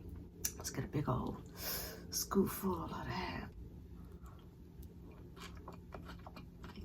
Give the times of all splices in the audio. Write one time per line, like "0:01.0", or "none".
0:03.5

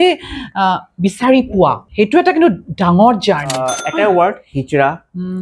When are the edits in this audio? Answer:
0:03.8

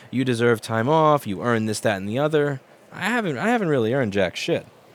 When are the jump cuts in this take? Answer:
none

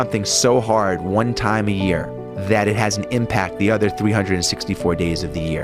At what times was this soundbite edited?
none

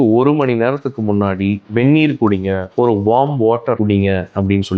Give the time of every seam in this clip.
0:03.8

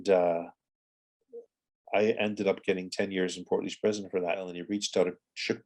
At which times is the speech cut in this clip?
0:04.6

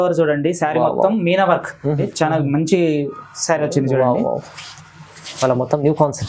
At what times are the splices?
0:02.1

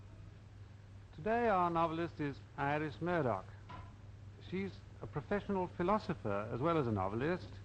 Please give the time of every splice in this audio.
none

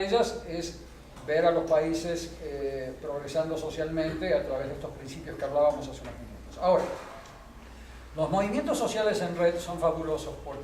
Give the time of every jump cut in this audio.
0:09.2

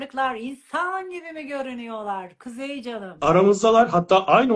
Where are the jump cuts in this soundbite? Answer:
0:03.2

